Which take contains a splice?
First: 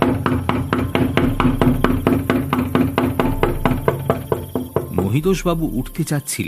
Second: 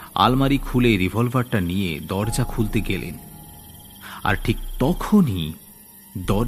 first; 1 cut; at 5.0 s

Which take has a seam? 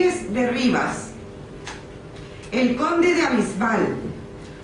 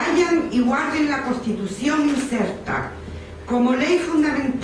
second; 1 cut; at 2.4 s

